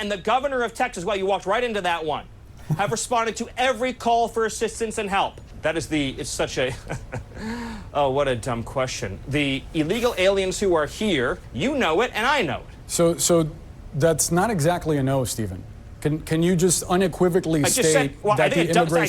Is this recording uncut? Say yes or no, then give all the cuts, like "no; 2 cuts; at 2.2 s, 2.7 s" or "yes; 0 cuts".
no; 2 cuts; at 5.5 s, 11.5 s